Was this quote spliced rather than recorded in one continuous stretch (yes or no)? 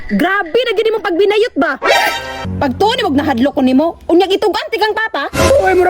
yes